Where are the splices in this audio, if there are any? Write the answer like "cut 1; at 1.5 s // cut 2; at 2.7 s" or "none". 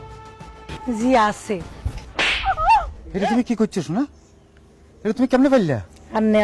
cut 1; at 3.0 s